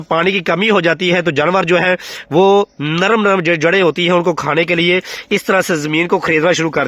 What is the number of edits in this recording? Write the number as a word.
zero